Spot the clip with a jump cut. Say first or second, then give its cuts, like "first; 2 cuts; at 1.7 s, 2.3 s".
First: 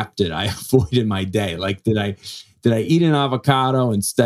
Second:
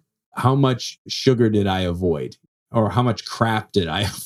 second; 1 cut; at 2.5 s